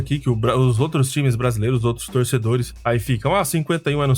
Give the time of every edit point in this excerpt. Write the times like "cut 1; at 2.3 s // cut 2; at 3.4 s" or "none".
none